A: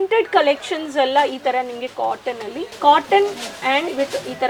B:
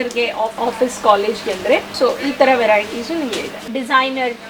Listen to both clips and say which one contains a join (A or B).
B